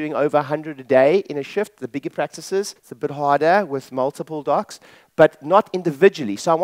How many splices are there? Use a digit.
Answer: 1